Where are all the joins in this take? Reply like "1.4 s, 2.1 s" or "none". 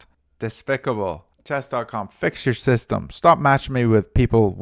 1.3 s